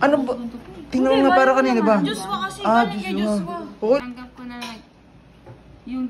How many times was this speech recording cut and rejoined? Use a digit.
1